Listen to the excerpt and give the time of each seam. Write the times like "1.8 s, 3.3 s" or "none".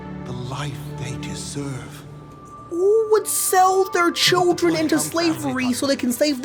none